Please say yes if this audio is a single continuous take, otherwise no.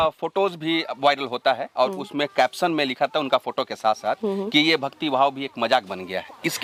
yes